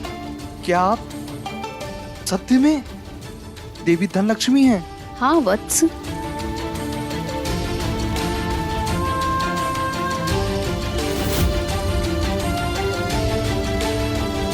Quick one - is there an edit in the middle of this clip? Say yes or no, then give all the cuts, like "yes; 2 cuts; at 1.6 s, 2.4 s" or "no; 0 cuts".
no; 0 cuts